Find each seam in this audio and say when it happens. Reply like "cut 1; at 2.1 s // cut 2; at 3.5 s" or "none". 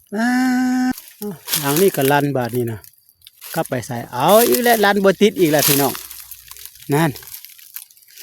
cut 1; at 0.9 s